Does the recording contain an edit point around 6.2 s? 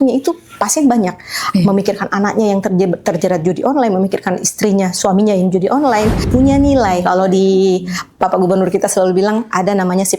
yes; 1 cut; at 6.2 s

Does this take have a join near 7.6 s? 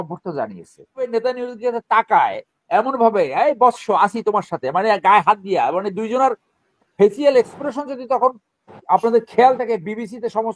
no; 1 cut; at 1.1 s

